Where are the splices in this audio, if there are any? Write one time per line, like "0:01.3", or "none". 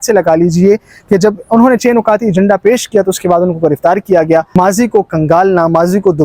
0:04.5